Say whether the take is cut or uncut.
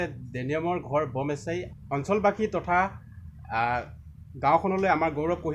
cut